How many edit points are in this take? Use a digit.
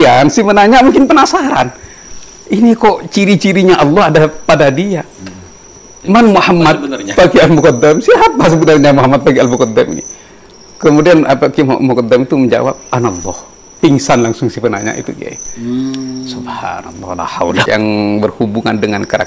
1